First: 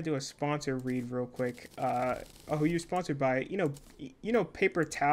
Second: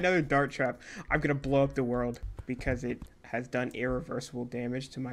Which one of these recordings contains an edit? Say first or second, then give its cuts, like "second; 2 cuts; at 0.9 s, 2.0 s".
second; 1 cut; at 2.3 s